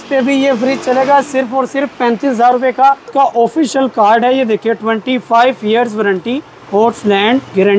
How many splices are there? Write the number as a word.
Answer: one